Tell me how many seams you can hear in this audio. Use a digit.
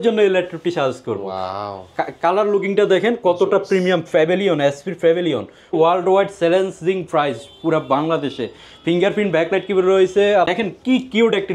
2